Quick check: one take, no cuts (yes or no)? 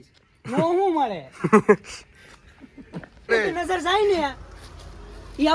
no